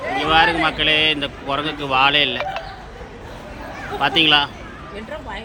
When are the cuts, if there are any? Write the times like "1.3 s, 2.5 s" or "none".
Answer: none